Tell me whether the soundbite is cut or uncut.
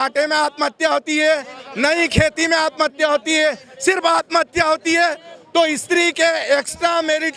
uncut